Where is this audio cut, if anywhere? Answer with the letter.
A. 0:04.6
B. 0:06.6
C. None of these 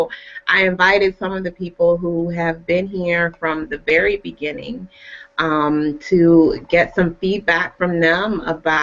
A